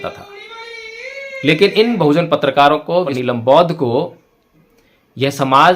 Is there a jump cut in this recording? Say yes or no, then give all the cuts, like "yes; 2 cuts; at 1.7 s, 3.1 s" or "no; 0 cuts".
yes; 1 cut; at 3.1 s